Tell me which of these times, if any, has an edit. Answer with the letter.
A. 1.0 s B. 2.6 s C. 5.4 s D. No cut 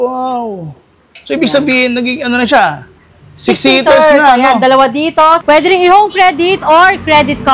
C